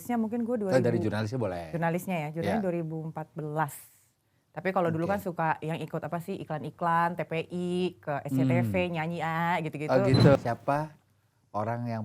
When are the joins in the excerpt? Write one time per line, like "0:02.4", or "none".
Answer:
0:10.4